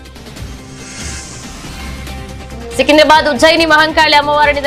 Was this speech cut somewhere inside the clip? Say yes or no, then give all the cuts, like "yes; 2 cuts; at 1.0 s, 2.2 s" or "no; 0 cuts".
no; 0 cuts